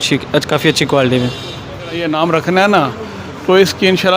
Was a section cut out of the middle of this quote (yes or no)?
yes